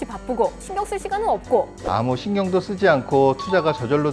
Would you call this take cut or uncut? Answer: cut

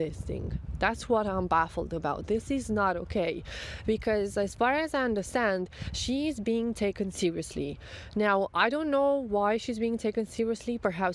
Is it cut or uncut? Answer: uncut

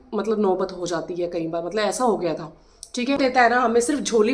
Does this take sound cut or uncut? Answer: cut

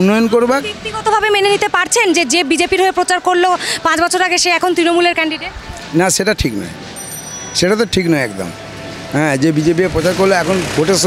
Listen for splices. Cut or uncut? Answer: uncut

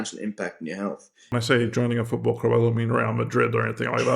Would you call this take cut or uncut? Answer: cut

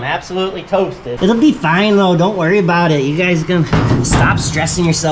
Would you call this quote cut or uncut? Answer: cut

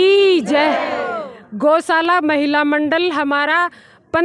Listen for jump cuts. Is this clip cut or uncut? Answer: uncut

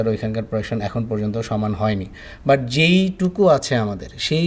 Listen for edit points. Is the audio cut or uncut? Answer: uncut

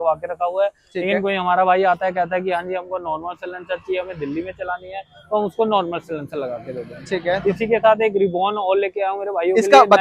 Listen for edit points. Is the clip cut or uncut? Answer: uncut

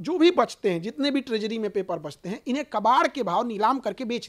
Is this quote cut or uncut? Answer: uncut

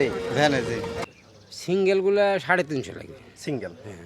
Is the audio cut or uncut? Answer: cut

